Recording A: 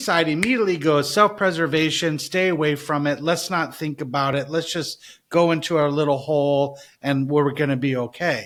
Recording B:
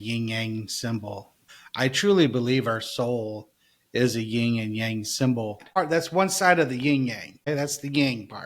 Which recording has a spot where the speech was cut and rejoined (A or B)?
B